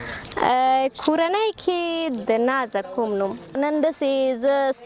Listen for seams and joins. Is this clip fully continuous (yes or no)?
no